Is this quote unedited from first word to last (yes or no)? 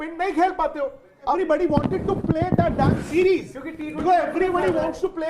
no